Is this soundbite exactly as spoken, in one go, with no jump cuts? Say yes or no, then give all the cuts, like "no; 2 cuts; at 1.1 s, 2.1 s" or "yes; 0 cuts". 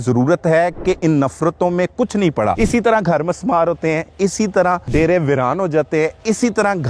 no; 2 cuts; at 2.6 s, 4.9 s